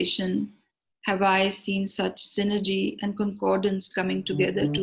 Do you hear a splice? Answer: yes; 1 cut; at 3.9 s

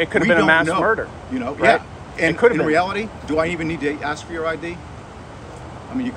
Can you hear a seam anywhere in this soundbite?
no; 0 cuts

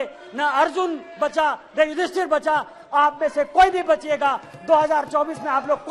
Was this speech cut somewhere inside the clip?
no; 0 cuts

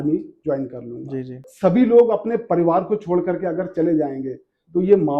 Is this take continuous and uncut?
no; 1 cut; at 1.5 s

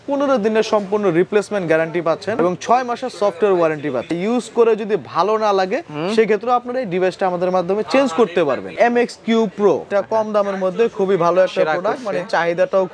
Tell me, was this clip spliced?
yes; 4 cuts; at 2.4 s, 4.1 s, 8.7 s, 9.9 s

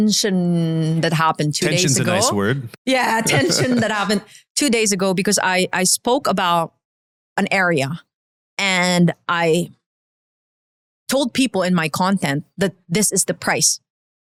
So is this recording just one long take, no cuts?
yes; 0 cuts

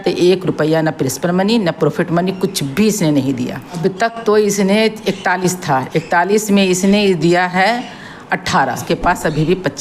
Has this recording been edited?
yes; 2 cuts; at 3.8 s, 8.8 s

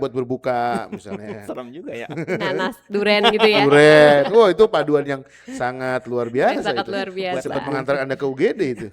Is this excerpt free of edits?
yes; 0 cuts

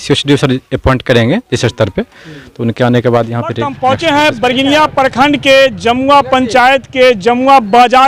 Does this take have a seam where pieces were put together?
yes; 1 cut; at 3.7 s

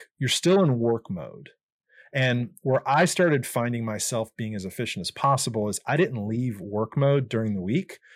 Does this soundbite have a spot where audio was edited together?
no; 0 cuts

